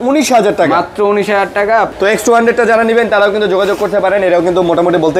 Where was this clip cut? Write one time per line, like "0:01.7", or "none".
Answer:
0:01.9